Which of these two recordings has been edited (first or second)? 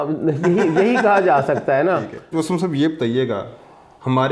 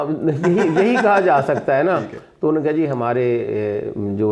first